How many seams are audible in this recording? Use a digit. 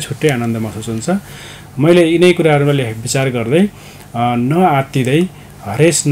0